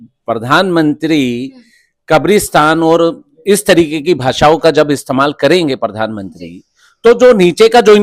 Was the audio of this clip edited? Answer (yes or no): no